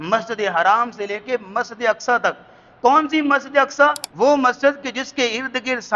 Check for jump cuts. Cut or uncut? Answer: cut